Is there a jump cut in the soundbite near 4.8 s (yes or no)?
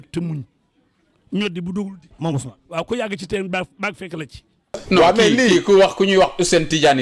yes